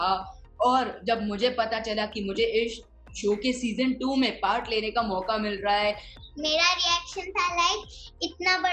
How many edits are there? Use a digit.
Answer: 1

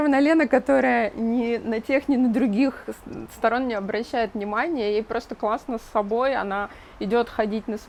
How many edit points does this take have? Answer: 0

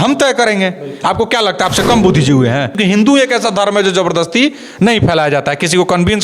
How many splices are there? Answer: 1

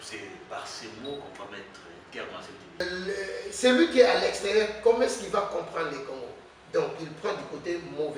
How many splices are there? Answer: 1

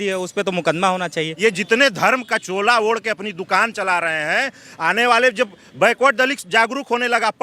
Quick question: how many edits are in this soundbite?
1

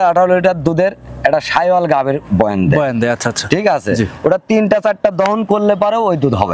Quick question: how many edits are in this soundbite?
0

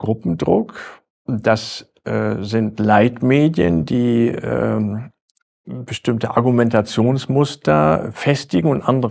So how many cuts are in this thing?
0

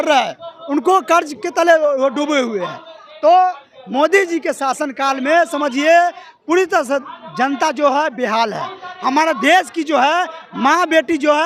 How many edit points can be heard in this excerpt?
0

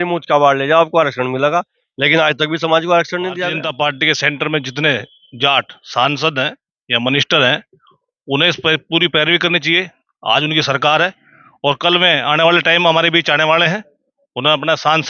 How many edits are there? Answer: 1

